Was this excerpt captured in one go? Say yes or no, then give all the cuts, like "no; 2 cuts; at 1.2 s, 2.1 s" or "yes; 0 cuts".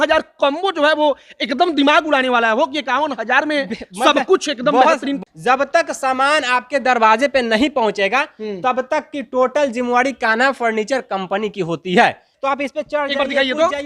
no; 2 cuts; at 5.2 s, 12.3 s